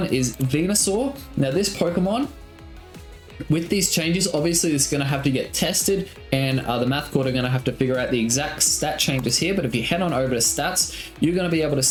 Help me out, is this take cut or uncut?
uncut